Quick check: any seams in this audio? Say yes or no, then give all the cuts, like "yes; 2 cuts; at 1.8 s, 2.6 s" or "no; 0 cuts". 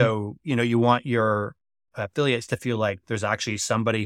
no; 0 cuts